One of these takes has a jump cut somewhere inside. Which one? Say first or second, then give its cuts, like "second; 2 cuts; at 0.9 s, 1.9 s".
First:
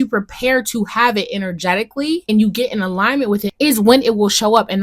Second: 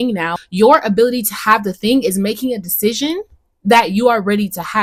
first; 2 cuts; at 2.3 s, 3.5 s